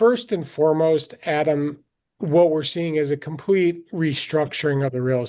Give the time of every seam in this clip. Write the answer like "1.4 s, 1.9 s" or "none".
none